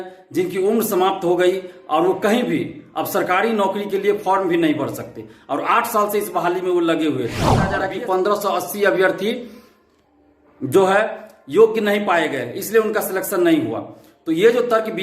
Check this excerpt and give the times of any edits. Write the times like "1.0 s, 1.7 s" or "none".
7.7 s